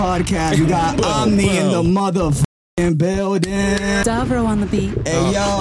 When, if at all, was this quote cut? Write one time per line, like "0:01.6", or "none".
0:04.0